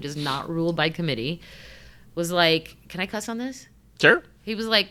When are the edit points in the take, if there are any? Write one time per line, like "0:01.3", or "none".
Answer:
none

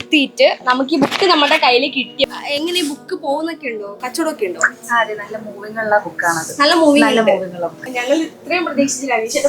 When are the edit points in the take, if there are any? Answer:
0:02.4
0:07.8

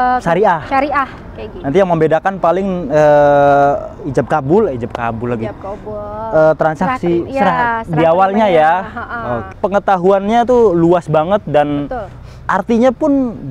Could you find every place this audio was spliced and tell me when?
0:09.5

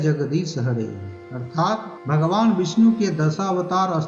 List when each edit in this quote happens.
0:01.9

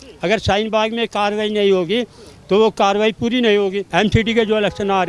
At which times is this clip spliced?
0:03.8

